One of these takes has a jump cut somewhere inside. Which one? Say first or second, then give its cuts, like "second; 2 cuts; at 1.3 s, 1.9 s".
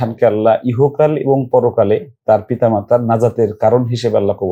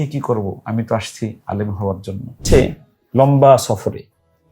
second; 2 cuts; at 1.4 s, 2.4 s